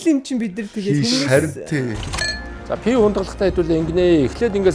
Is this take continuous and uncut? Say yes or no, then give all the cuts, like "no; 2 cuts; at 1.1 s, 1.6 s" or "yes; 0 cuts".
no; 1 cut; at 2.1 s